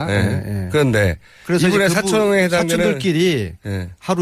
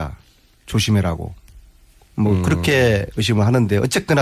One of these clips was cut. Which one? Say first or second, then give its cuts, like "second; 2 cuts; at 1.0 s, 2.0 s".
first; 1 cut; at 2.4 s